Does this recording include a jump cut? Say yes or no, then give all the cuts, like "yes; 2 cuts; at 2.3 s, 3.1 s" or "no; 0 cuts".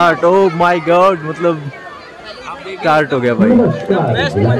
no; 0 cuts